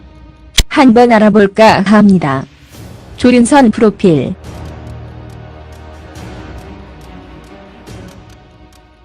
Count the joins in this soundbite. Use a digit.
1